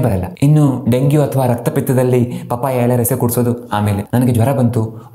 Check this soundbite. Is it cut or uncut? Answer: cut